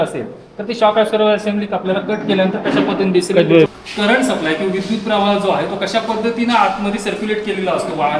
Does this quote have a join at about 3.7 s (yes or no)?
yes